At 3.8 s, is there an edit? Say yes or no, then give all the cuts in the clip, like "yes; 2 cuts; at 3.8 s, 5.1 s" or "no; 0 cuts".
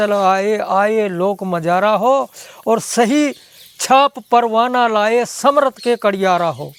no; 0 cuts